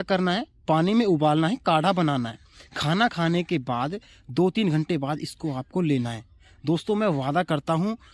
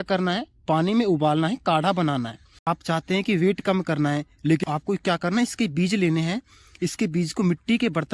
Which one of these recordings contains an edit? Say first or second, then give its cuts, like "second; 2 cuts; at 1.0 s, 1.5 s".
second; 2 cuts; at 2.7 s, 4.6 s